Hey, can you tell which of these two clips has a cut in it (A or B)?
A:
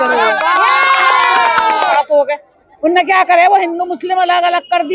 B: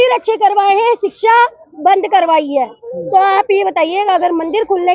A